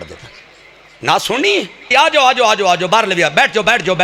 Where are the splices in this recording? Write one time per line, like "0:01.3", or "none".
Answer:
0:01.9

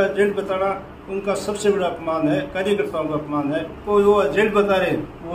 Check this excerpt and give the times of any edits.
0:03.8

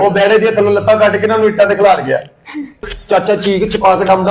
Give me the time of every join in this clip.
0:03.0

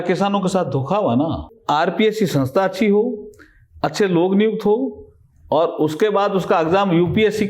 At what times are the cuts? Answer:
0:01.5

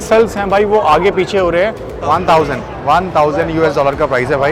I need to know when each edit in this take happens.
0:01.9

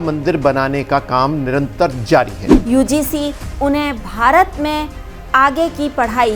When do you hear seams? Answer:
0:02.5

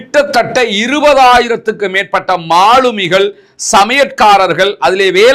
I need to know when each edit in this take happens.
none

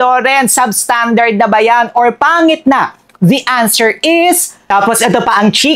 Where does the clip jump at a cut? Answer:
0:04.6

